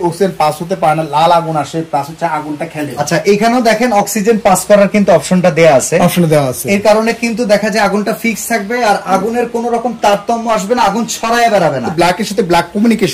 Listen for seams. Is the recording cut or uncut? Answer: cut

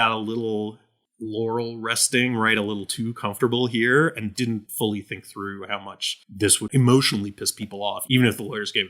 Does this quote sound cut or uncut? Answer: cut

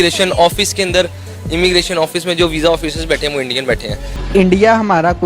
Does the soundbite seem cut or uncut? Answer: cut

